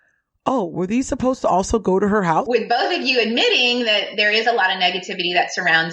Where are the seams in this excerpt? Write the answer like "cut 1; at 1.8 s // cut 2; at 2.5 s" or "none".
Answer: cut 1; at 2.5 s